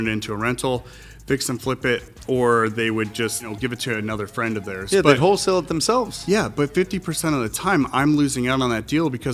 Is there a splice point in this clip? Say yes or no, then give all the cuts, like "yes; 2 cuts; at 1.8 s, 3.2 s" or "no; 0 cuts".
yes; 1 cut; at 3.5 s